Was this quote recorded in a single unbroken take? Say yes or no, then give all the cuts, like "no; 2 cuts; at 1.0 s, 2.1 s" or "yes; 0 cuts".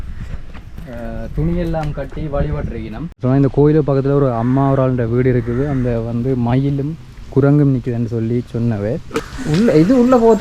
no; 2 cuts; at 3.1 s, 9.3 s